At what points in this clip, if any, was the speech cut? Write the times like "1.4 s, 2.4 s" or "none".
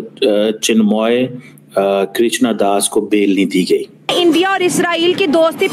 4.0 s